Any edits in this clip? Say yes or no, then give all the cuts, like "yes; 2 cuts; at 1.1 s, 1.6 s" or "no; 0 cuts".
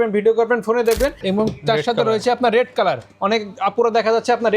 yes; 1 cut; at 1.2 s